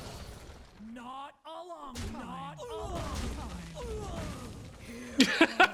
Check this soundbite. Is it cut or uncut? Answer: uncut